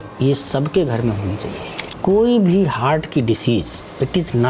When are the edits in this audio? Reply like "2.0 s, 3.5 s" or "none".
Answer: 1.9 s